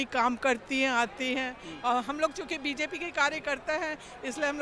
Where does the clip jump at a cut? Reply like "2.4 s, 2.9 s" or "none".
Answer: none